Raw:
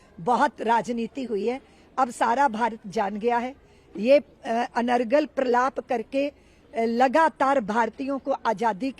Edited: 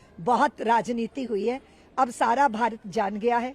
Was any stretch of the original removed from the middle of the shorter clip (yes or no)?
no